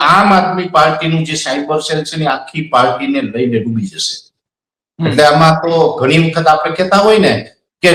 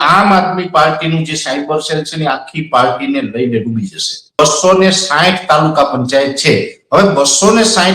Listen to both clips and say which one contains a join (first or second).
second